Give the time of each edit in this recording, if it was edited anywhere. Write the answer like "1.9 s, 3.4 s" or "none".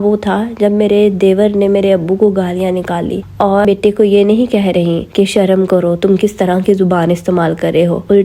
3.6 s